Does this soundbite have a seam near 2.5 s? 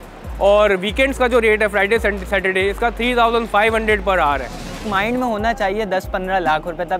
no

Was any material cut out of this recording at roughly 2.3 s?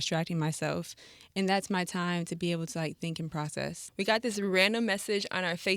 no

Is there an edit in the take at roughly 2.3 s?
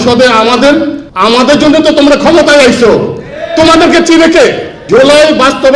no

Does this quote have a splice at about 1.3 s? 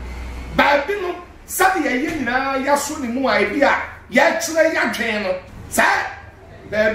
no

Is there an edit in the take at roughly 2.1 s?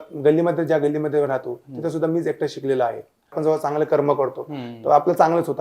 no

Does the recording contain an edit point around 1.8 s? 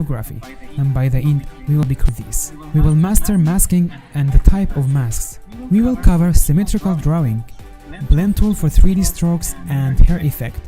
yes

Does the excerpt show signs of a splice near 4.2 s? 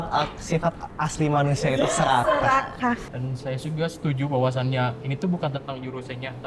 no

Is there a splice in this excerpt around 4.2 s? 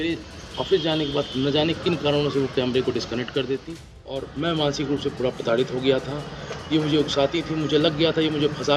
yes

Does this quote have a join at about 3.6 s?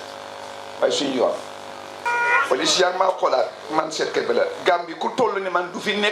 no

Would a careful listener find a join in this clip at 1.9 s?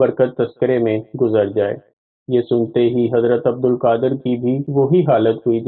yes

